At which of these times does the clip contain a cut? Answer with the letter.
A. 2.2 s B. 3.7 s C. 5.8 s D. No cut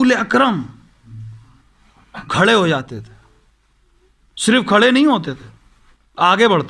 A